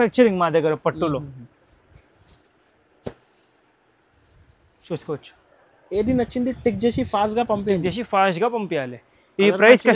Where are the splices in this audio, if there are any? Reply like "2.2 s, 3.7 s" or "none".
none